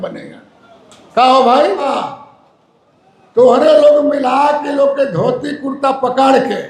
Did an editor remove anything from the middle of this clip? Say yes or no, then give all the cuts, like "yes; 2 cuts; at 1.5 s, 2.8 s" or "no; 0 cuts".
yes; 1 cut; at 1.9 s